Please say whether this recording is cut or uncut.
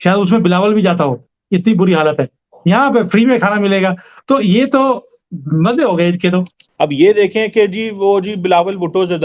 cut